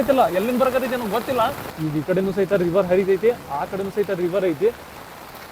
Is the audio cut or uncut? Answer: cut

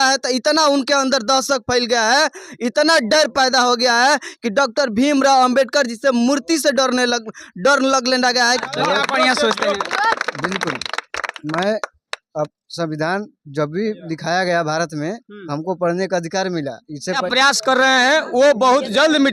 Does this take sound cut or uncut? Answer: cut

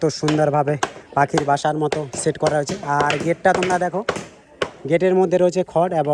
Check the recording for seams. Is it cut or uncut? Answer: uncut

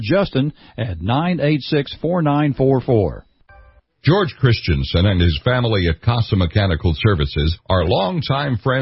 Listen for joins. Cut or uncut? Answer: cut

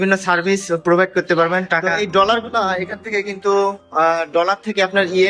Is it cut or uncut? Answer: cut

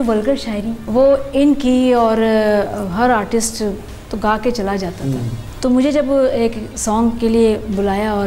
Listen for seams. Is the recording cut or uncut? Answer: cut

